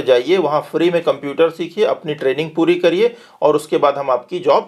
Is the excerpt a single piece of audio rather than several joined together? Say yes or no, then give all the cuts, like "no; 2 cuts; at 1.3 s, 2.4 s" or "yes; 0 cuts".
yes; 0 cuts